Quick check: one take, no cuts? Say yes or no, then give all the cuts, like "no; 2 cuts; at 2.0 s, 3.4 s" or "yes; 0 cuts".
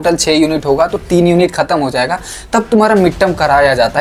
yes; 0 cuts